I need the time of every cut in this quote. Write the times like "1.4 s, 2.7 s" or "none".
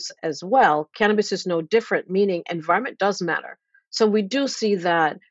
none

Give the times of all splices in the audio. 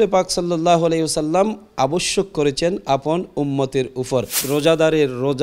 4.4 s

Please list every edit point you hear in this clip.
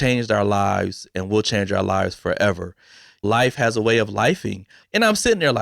3.2 s

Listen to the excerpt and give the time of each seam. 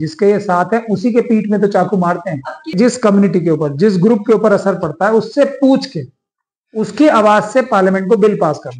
2.7 s

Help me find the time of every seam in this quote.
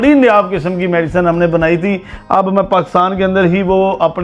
2.1 s

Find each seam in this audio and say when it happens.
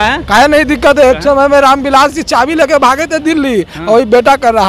none

